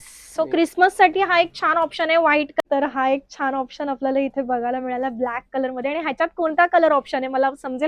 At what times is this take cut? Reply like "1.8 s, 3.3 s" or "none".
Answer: 2.6 s